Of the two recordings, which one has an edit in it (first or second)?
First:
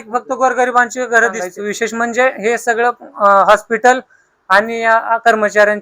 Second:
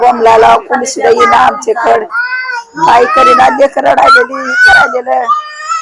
first